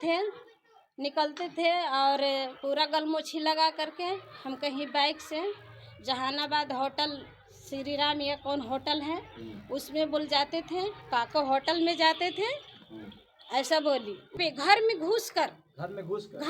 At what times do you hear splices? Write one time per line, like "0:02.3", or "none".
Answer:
0:14.4